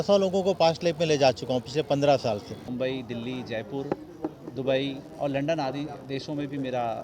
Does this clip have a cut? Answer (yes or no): yes